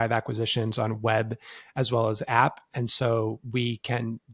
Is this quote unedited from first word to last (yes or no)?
yes